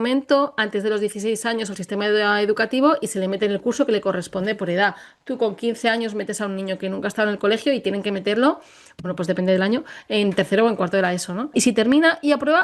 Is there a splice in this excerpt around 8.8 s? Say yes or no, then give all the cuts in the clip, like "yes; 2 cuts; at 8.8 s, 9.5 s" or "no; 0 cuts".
no; 1 cut; at 11.5 s